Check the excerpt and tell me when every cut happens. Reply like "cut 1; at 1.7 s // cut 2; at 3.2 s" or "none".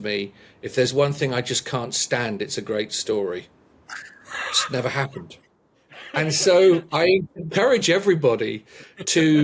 cut 1; at 7.4 s